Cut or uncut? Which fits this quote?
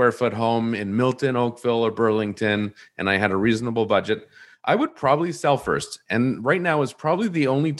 uncut